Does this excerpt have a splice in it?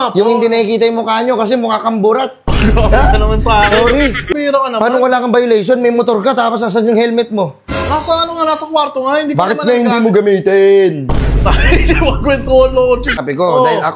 yes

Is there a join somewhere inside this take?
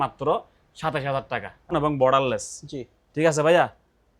yes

